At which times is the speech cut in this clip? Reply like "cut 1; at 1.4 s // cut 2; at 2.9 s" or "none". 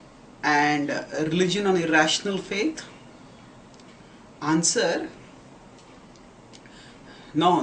cut 1; at 1.9 s